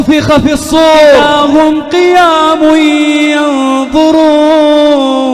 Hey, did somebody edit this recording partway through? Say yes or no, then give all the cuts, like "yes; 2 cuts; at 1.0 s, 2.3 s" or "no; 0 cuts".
yes; 1 cut; at 1.2 s